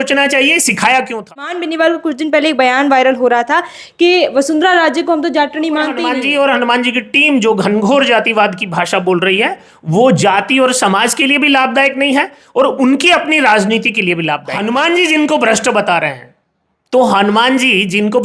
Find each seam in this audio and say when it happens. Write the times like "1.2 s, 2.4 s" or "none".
1.6 s, 6.0 s, 14.5 s

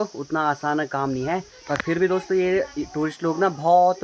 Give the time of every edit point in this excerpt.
none

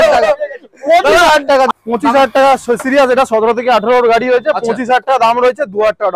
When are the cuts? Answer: 1.7 s

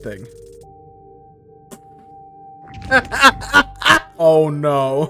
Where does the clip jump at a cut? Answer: 4.1 s

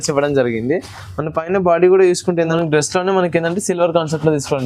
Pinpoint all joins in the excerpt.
2.5 s

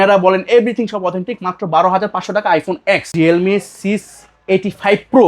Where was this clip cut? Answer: 3.1 s

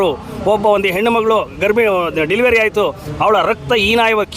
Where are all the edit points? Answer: none

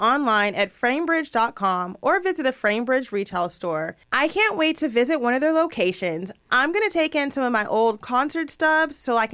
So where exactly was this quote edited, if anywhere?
4.0 s

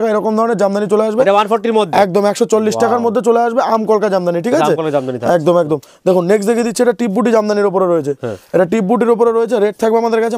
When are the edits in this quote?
none

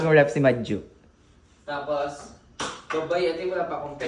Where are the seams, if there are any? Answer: none

